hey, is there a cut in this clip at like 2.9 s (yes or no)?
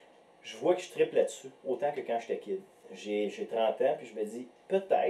yes